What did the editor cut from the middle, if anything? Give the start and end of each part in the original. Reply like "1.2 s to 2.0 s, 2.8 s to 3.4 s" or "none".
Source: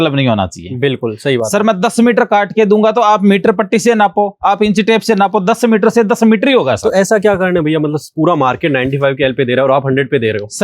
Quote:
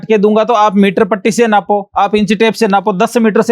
none